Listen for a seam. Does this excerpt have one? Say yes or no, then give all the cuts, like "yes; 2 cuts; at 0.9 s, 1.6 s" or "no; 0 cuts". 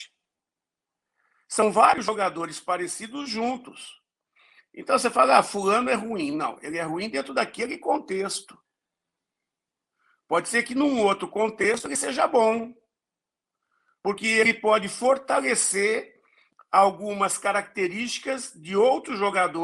no; 0 cuts